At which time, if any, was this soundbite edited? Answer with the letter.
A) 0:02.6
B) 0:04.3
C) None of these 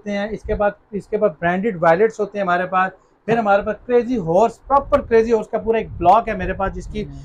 C